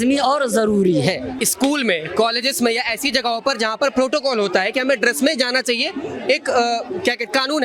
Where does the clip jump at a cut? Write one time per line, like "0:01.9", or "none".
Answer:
0:01.3

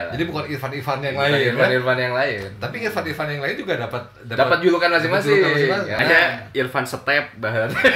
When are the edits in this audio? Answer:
0:05.9

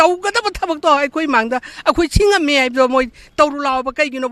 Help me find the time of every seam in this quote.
none

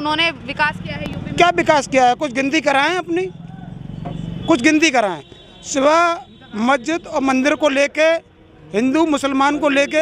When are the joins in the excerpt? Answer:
none

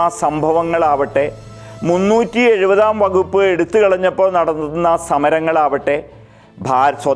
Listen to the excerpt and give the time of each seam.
none

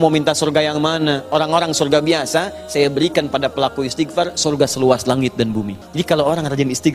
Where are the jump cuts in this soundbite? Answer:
0:05.8

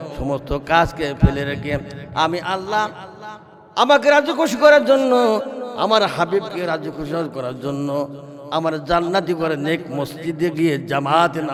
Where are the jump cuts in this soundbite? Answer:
none

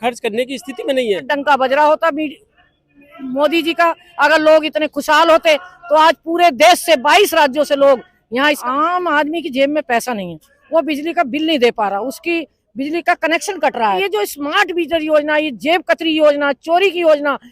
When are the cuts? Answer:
0:01.3
0:08.6
0:14.0

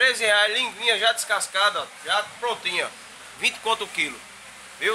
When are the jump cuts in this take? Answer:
none

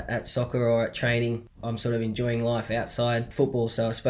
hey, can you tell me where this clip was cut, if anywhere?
0:01.5
0:03.3

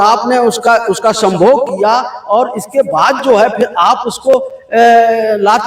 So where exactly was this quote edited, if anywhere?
none

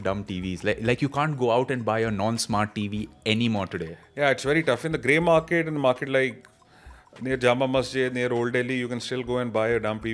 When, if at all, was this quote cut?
none

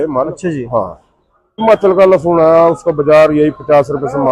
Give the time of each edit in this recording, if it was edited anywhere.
0:01.6

